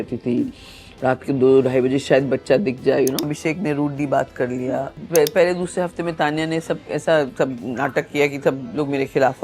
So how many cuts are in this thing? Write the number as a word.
two